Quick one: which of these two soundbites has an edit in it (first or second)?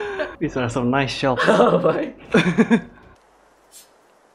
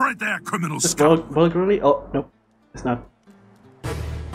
first